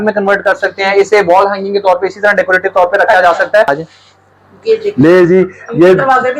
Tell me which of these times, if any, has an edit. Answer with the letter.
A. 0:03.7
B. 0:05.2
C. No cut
A